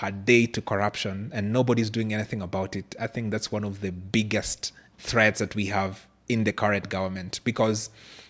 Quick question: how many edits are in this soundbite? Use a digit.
0